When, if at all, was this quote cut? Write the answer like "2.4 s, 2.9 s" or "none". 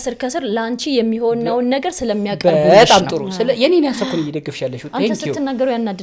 none